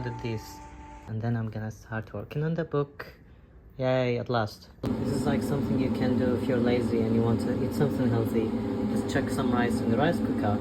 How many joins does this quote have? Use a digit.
2